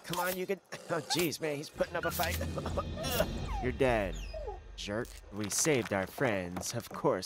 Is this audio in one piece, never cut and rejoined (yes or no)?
no